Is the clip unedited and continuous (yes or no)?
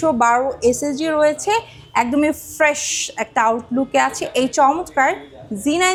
yes